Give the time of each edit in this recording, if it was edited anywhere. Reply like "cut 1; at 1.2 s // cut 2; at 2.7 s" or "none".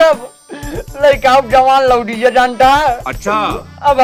none